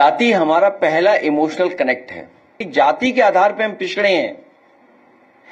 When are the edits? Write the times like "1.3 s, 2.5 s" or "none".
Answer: 2.6 s